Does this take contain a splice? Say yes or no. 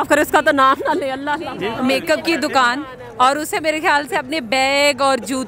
yes